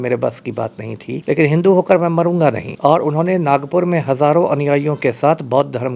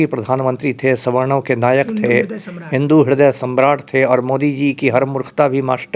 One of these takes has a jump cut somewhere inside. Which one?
first; 2 cuts; at 1.2 s, 2.7 s

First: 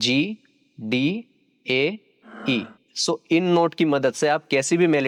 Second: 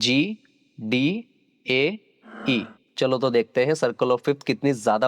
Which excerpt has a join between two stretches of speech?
second; 1 cut; at 2.8 s

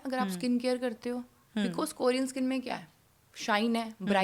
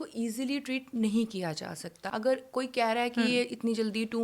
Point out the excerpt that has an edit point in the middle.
second; 1 cut; at 2.0 s

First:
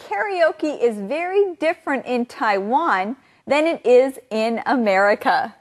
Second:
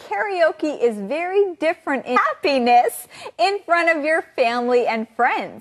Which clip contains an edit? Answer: first; 1 cut; at 2.2 s

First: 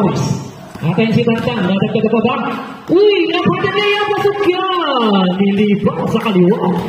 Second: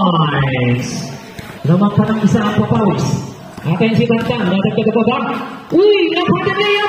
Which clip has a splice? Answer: second; 1 cut; at 1.6 s

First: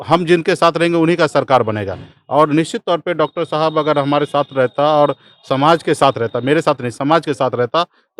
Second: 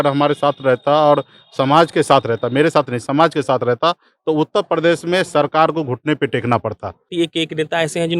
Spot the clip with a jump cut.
second; 1 cut; at 7.1 s

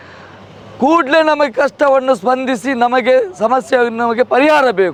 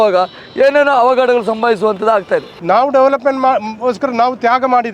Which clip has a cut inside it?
second; 1 cut; at 2.5 s

